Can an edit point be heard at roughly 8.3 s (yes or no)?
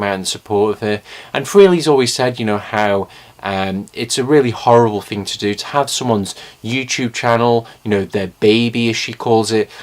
yes